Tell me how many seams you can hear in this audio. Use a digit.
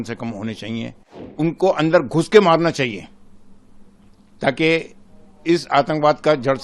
1